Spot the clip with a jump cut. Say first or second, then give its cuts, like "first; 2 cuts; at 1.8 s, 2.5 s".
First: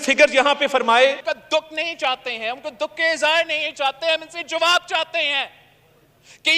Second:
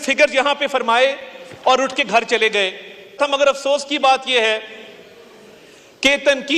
first; 1 cut; at 1.3 s